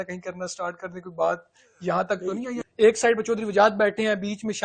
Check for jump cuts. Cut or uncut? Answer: cut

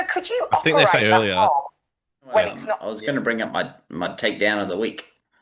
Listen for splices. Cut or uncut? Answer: cut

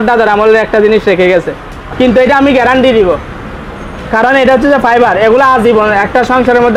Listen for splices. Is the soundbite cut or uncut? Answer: cut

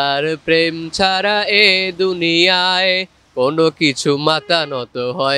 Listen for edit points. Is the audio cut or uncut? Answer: uncut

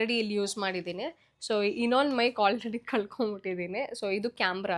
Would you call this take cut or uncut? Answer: uncut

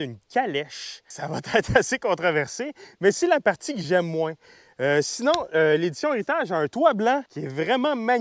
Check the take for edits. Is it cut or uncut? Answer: uncut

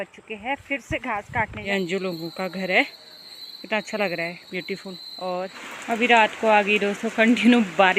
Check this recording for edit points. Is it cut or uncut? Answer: cut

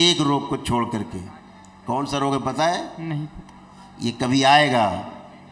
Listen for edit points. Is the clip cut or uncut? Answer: uncut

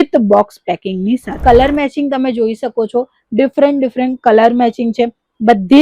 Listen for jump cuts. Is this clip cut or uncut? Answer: cut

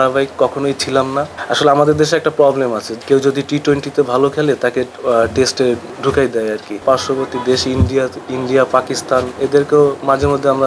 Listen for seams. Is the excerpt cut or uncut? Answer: cut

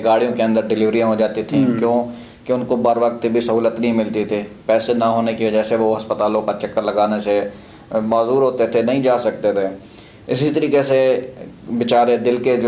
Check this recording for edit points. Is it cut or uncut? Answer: uncut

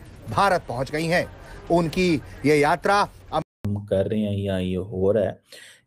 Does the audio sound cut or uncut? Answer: cut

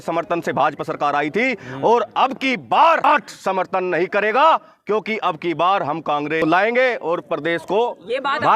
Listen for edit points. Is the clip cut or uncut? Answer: cut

